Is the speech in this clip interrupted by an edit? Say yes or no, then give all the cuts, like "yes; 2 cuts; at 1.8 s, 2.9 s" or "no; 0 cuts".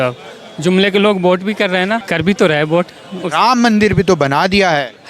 yes; 1 cut; at 2.0 s